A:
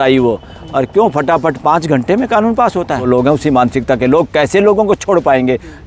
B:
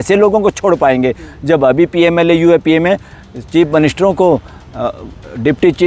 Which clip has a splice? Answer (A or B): A